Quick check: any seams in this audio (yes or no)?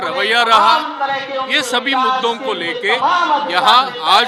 no